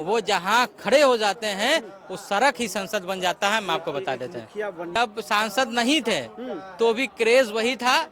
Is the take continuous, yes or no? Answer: no